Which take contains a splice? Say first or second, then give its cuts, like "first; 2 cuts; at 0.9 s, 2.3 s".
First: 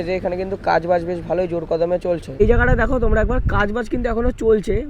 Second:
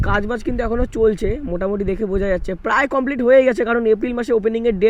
first; 1 cut; at 2.4 s